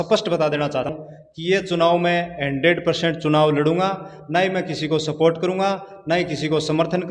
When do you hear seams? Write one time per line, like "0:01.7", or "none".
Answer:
0:00.9